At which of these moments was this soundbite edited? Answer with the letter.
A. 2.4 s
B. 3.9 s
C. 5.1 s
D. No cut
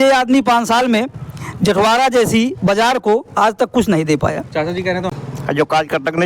C